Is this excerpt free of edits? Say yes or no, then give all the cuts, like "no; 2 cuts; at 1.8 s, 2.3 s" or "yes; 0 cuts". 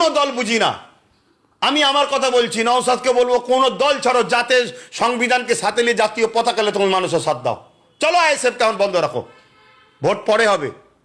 yes; 0 cuts